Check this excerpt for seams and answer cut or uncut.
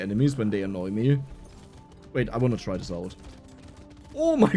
uncut